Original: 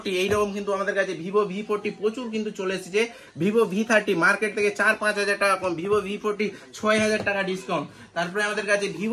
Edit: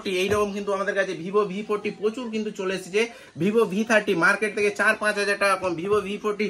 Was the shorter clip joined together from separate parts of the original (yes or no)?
no